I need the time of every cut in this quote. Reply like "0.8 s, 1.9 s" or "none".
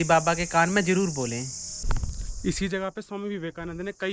1.8 s